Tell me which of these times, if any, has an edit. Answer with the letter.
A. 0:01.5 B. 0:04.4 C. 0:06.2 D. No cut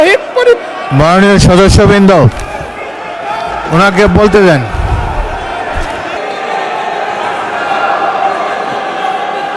C